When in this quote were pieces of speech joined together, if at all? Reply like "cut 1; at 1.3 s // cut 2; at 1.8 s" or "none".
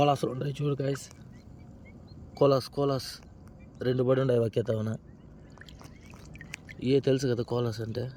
none